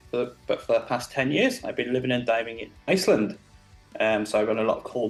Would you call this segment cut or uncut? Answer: uncut